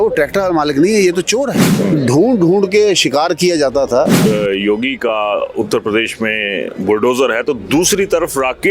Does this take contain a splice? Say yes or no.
yes